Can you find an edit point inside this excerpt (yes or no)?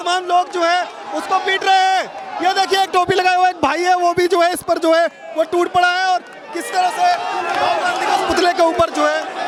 no